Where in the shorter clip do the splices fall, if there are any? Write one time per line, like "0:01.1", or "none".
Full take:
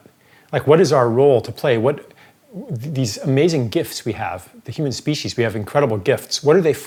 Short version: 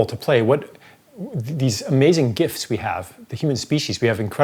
none